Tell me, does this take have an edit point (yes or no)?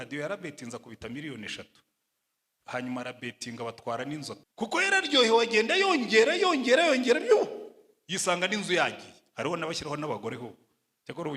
yes